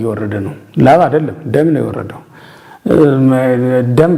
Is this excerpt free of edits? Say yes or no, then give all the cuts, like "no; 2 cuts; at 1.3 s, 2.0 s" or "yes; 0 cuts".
yes; 0 cuts